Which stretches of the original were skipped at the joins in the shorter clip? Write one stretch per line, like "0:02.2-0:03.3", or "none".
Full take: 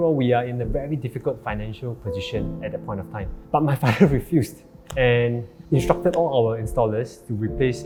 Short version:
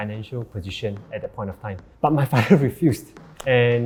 none